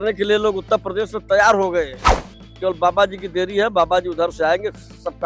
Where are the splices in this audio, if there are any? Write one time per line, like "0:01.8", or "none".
none